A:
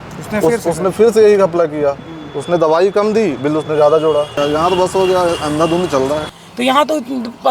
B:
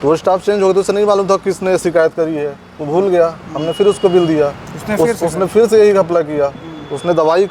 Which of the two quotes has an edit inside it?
A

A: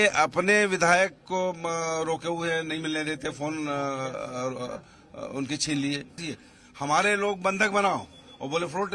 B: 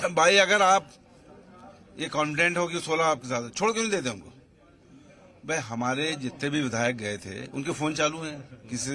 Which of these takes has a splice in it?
A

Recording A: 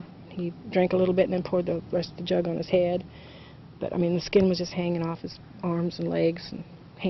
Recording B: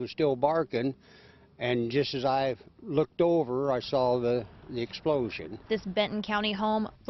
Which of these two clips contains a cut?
A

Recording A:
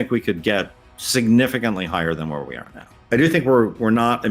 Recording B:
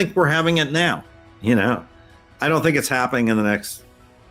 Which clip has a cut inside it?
A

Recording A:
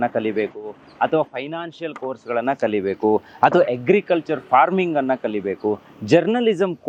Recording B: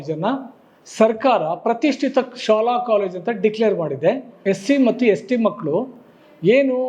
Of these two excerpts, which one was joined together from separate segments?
B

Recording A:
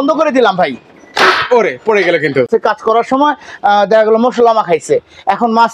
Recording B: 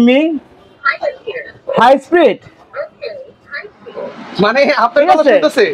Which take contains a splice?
A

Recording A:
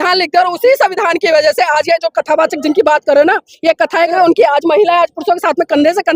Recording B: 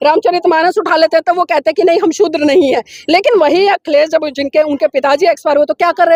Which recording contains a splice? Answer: A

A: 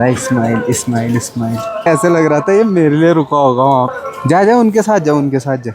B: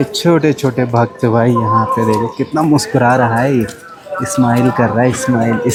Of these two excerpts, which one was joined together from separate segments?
A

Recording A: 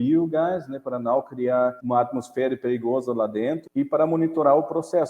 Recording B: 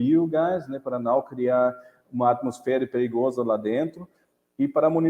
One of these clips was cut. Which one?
A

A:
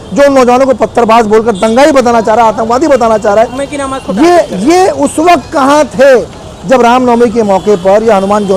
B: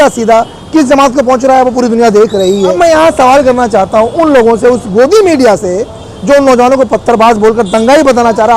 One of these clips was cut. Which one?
B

